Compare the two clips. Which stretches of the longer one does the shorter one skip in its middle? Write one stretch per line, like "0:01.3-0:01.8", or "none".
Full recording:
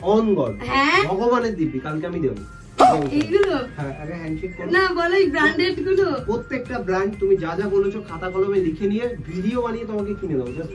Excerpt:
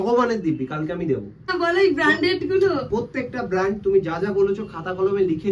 0:02.7-0:04.9